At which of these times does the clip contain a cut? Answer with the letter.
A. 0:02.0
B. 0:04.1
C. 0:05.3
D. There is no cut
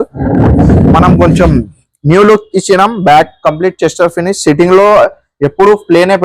D